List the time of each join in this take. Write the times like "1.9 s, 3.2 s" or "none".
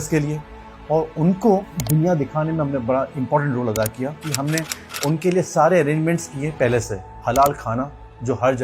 1.7 s, 4.3 s

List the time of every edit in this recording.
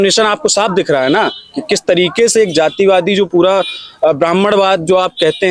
none

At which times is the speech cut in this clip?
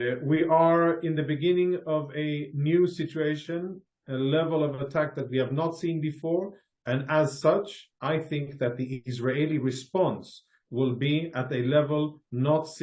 none

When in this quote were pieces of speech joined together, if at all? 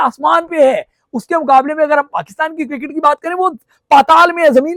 none

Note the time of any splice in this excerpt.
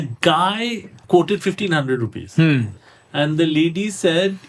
0.9 s

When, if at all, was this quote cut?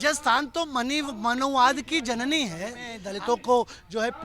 3.0 s

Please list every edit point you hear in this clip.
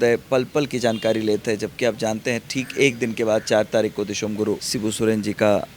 4.7 s

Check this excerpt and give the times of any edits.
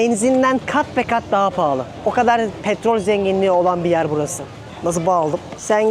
none

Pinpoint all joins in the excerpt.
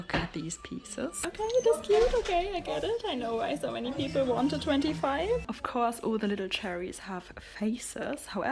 1.2 s, 5.5 s

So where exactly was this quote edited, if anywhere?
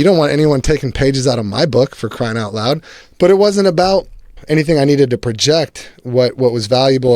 3.0 s, 4.4 s

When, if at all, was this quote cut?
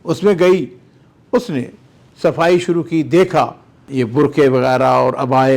3.8 s

